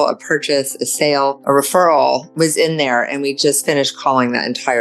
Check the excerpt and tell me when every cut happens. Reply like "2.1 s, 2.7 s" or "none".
1.4 s, 2.3 s